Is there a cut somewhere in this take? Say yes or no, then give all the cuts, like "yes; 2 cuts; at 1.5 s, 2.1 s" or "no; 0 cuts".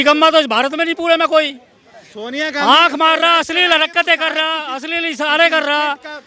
no; 0 cuts